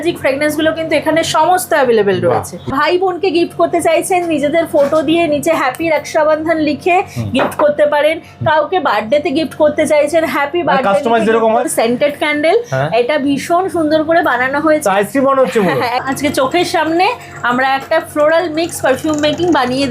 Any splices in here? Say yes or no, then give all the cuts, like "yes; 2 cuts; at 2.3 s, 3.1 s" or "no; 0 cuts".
yes; 3 cuts; at 2.7 s, 11.7 s, 16.0 s